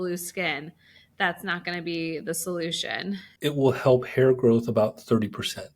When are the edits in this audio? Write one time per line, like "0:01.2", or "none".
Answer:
0:03.3